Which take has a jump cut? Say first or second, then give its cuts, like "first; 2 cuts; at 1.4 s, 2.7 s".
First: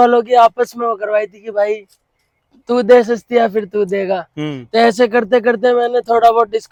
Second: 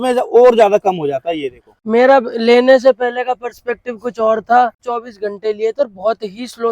second; 2 cuts; at 1.8 s, 4.9 s